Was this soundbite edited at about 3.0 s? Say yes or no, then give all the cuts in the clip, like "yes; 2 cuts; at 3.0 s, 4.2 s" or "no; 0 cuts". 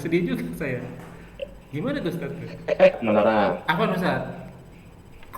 yes; 1 cut; at 3.0 s